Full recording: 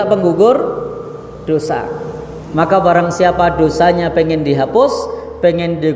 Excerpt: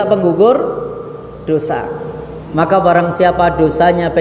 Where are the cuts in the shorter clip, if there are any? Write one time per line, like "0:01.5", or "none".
none

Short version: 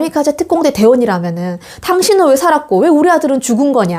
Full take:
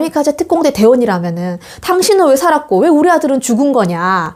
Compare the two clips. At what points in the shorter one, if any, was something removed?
none

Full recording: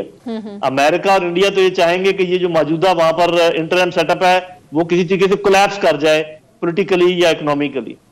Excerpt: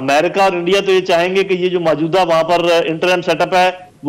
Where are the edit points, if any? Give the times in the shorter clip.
none

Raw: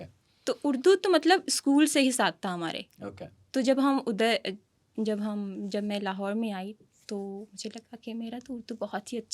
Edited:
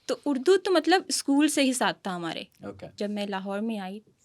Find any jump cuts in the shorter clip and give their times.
0:02.9

